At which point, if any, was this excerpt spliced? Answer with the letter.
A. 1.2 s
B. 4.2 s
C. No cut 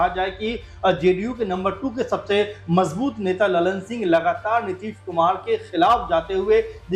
C